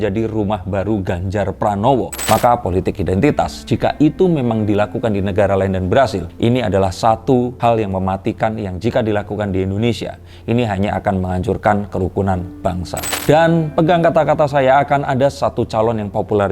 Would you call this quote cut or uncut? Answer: cut